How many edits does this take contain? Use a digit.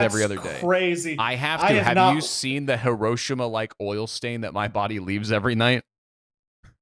0